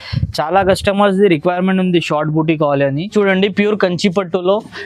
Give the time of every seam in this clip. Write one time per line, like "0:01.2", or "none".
0:03.0